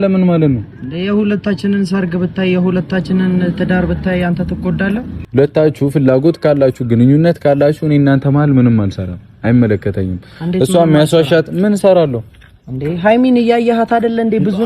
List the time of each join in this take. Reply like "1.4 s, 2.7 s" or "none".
5.2 s